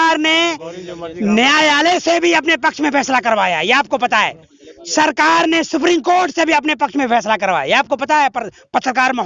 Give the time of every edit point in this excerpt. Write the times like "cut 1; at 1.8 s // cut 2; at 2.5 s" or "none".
none